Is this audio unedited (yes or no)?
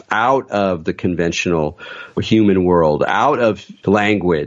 yes